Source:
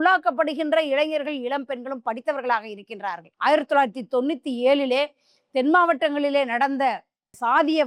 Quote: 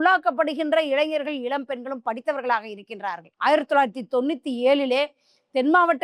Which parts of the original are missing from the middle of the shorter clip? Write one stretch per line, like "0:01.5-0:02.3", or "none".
none